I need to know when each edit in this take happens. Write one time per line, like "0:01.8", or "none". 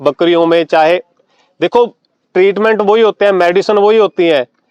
none